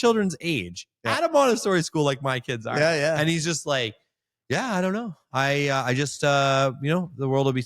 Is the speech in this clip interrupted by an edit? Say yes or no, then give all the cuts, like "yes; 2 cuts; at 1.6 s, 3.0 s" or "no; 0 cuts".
no; 0 cuts